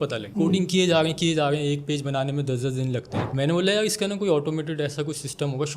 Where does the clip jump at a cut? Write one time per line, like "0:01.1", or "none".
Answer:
none